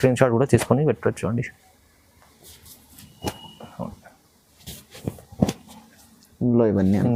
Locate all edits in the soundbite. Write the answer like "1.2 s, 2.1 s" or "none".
none